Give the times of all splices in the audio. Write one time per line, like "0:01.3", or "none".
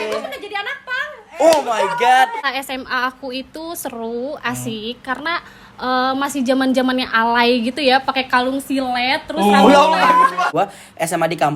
0:02.4
0:10.5